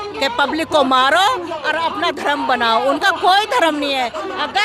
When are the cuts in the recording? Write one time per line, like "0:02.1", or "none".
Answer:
none